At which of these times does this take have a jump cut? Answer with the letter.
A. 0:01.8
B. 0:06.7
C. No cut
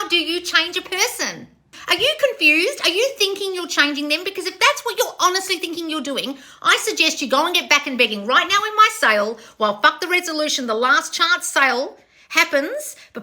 A